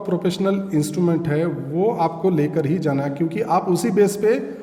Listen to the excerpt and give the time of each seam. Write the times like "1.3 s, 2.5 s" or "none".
none